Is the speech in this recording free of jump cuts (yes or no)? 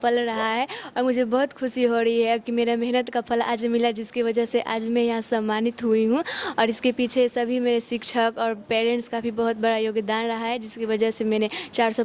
yes